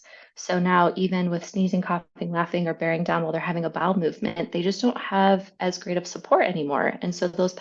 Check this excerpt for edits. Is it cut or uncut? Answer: uncut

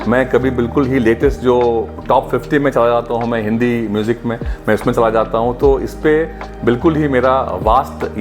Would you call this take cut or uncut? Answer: uncut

